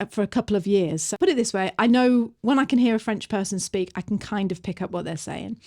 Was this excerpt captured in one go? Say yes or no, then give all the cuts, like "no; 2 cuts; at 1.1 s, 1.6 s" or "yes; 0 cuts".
no; 1 cut; at 1.0 s